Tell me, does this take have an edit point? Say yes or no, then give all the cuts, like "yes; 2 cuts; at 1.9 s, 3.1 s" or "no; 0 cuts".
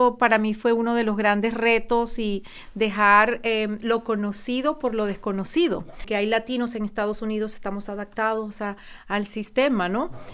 yes; 1 cut; at 6.0 s